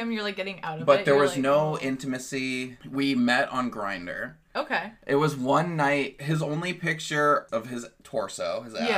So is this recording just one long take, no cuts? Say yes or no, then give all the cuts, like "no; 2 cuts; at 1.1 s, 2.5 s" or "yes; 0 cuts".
no; 4 cuts; at 2.8 s, 4.9 s, 6.2 s, 7.5 s